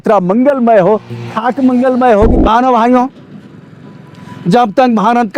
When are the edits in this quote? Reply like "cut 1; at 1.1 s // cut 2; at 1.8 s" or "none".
cut 1; at 2.3 s

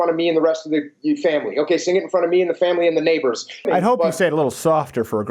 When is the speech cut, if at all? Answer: cut 1; at 3.7 s

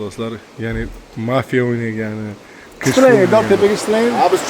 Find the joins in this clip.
cut 1; at 2.9 s

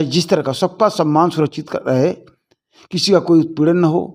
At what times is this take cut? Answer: none

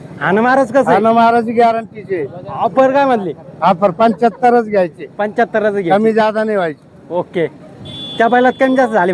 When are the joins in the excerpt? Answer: none

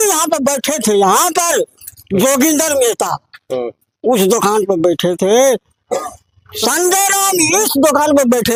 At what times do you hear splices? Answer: none

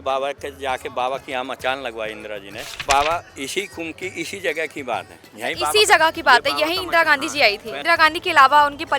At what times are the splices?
cut 1; at 2.8 s // cut 2; at 7.7 s

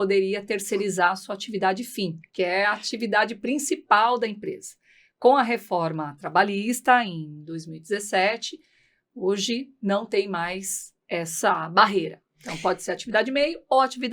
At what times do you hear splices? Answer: cut 1; at 2.2 s

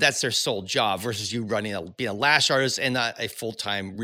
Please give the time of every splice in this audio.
none

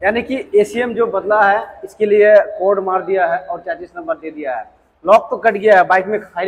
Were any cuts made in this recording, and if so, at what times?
none

